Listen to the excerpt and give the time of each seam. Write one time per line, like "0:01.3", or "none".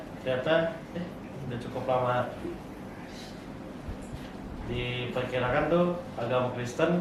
none